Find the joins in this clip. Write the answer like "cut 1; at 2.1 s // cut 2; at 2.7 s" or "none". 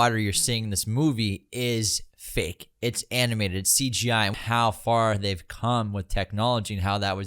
cut 1; at 4.3 s